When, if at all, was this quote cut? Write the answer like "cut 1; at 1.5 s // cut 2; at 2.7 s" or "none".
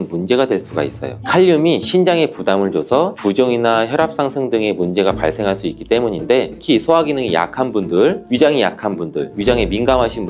cut 1; at 6.6 s